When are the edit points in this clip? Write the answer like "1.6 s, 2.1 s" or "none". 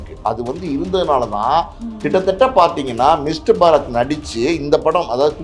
none